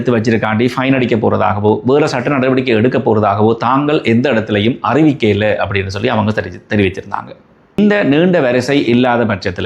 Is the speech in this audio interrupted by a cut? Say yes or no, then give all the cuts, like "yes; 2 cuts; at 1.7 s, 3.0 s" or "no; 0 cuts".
yes; 1 cut; at 7.8 s